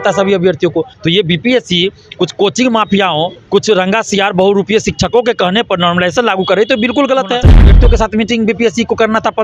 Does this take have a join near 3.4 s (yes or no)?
yes